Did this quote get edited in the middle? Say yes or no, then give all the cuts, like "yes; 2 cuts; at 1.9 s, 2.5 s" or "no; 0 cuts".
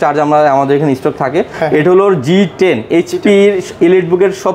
no; 0 cuts